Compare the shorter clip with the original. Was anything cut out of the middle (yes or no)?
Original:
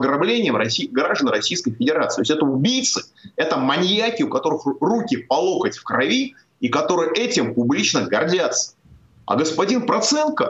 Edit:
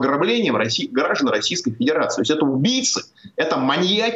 no